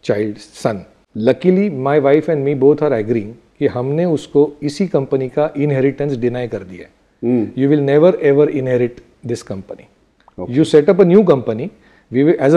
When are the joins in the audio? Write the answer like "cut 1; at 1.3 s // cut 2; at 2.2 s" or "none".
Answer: cut 1; at 1.0 s

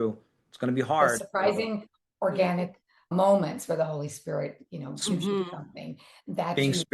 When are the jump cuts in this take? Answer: cut 1; at 3.1 s

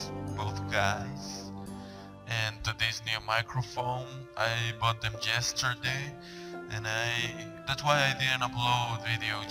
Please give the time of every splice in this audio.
none

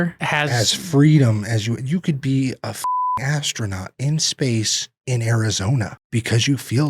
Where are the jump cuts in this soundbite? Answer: cut 1; at 6.0 s

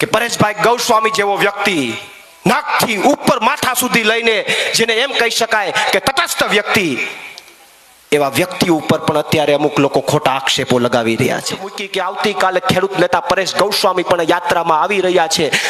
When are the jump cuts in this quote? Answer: cut 1; at 11.8 s

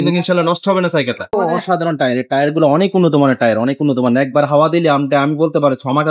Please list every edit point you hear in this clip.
cut 1; at 1.3 s

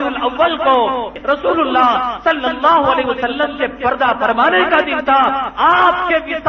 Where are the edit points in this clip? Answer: cut 1; at 1.1 s

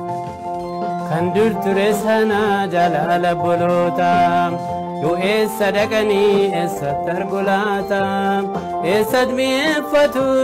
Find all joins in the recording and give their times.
none

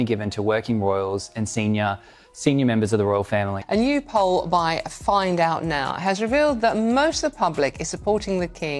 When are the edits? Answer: cut 1; at 3.6 s

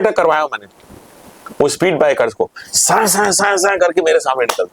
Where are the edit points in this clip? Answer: none

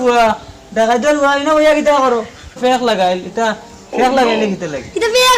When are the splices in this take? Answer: cut 1; at 2.6 s

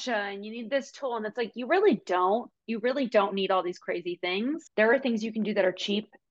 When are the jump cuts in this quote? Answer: cut 1; at 4.6 s

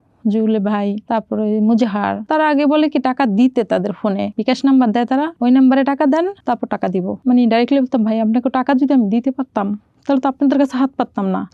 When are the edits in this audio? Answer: none

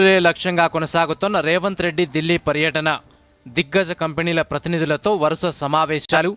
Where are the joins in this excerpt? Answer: none

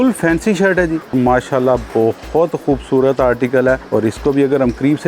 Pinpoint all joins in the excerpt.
cut 1; at 1.1 s // cut 2; at 3.8 s

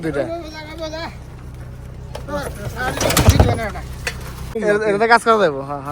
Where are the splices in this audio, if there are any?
cut 1; at 4.5 s

